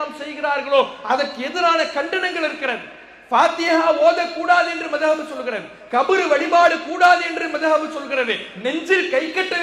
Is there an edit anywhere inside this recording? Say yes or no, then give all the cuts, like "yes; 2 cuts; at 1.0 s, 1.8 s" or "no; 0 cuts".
no; 0 cuts